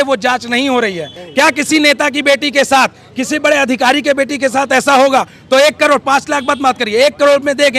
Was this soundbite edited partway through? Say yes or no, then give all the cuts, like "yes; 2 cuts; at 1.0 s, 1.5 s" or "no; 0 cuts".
yes; 1 cut; at 1.2 s